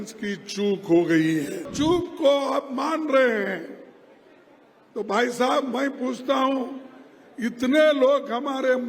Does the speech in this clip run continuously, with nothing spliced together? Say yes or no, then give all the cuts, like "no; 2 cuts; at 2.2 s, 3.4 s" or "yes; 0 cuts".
no; 1 cut; at 1.7 s